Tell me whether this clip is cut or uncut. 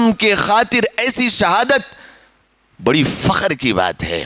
uncut